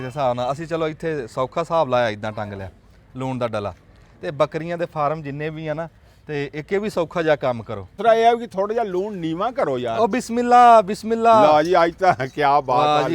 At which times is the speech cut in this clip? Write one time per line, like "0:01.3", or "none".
0:08.0